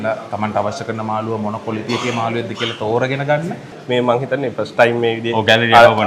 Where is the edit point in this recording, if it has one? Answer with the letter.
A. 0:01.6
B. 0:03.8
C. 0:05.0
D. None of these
B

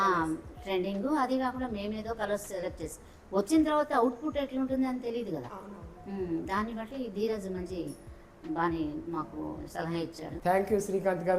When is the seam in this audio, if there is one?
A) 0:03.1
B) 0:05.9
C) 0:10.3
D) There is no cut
C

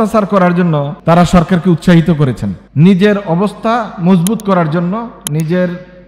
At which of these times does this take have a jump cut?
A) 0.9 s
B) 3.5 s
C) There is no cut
A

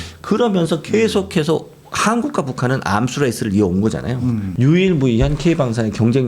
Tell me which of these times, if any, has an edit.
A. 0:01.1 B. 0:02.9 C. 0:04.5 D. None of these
C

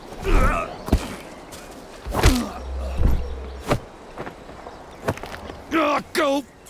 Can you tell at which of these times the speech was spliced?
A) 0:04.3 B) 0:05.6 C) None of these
B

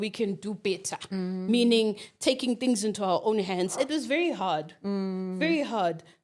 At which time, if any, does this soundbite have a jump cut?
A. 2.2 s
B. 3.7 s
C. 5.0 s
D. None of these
B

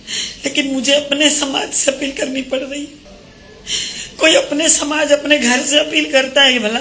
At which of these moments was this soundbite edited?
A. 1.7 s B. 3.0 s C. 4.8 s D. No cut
D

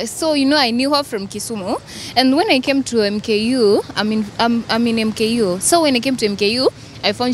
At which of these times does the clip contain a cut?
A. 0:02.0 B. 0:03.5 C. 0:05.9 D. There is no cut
D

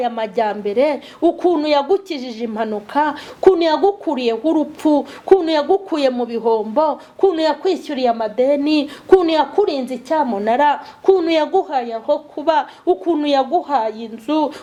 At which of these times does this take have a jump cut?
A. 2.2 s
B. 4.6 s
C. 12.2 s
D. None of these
D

